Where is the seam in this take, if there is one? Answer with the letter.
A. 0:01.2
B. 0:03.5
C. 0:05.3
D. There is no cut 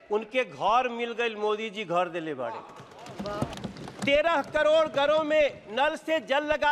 B